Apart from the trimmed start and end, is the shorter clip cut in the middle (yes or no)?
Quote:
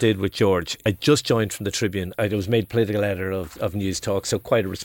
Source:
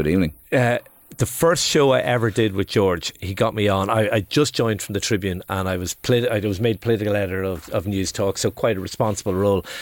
yes